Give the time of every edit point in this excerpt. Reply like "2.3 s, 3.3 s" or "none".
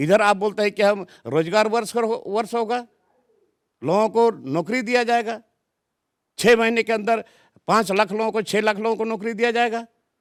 none